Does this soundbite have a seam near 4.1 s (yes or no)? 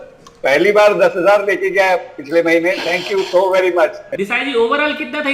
yes